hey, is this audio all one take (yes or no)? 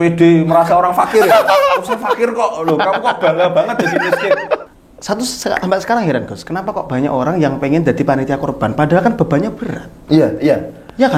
no